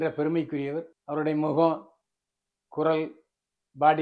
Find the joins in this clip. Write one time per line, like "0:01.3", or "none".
0:01.0